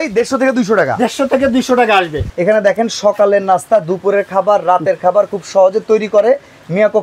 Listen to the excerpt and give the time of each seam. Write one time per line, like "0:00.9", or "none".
0:02.2